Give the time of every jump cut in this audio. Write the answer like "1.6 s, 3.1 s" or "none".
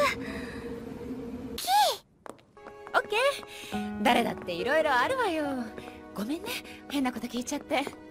none